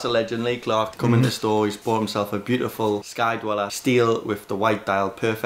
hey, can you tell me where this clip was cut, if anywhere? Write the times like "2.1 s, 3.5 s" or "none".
none